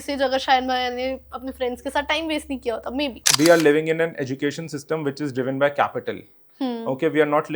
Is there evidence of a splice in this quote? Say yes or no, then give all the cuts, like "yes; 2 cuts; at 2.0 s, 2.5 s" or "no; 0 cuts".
yes; 1 cut; at 3.3 s